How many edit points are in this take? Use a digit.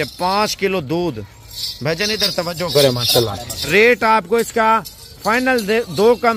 1